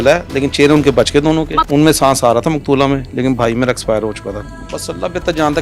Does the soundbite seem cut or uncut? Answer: cut